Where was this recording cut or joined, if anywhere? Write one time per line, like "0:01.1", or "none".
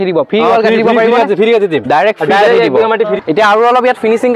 0:03.1